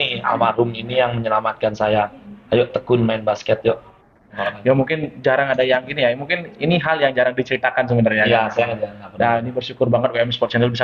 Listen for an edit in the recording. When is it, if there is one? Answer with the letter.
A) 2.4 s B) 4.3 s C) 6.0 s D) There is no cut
B